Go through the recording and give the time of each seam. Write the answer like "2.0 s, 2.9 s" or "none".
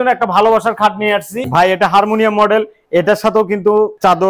1.4 s